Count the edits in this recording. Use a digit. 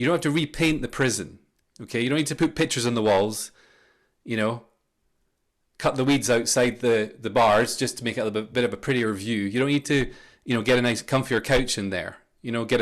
0